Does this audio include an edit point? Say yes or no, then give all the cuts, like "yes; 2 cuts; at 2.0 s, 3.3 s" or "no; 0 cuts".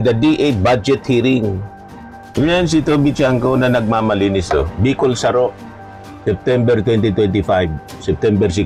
no; 0 cuts